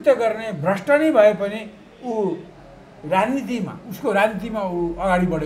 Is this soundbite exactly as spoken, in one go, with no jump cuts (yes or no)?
yes